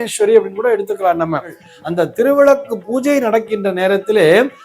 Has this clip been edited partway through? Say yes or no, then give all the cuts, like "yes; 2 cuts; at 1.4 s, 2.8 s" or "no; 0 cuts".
yes; 1 cut; at 1.7 s